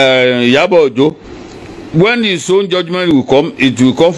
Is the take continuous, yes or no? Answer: no